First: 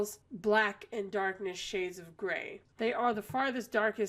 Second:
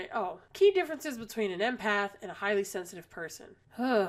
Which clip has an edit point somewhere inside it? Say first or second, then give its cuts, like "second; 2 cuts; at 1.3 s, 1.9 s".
first; 1 cut; at 2.6 s